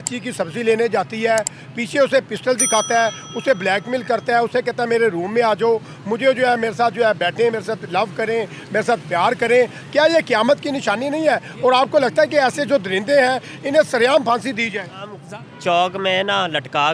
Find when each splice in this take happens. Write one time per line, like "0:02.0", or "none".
0:15.2